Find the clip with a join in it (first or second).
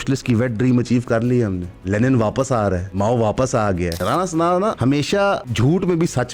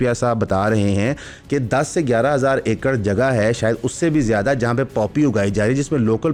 first